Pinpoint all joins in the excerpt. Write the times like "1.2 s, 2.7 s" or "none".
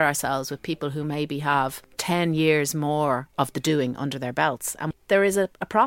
1.9 s, 4.9 s

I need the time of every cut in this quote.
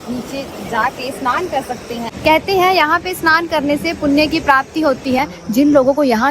2.0 s, 5.2 s

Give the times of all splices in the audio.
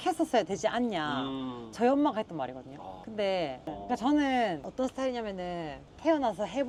none

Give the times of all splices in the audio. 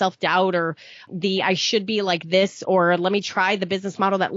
1.1 s

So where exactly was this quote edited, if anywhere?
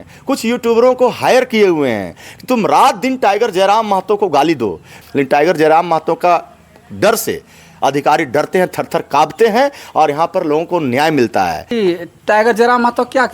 4.9 s, 11.7 s

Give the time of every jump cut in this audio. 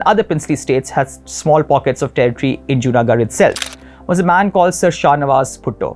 3.7 s

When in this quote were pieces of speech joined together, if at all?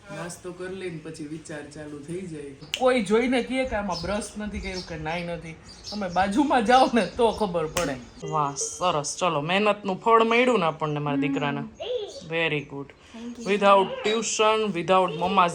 2.6 s, 8.1 s

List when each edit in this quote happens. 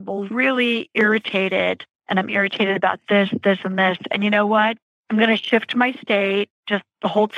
1.9 s, 4.9 s

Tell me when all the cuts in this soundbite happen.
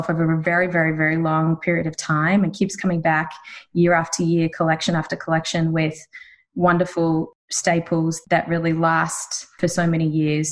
7.3 s, 8.2 s, 9.5 s

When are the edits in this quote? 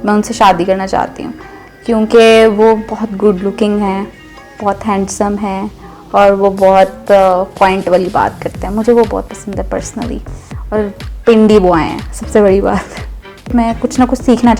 13.5 s

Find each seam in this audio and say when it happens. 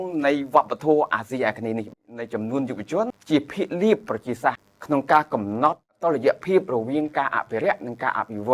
2.1 s, 3.2 s, 4.7 s, 6.0 s

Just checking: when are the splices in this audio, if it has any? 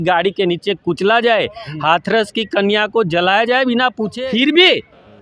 4.1 s

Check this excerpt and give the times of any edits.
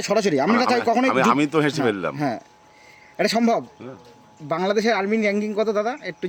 none

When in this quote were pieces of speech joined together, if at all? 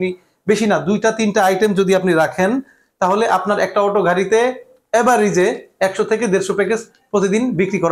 none

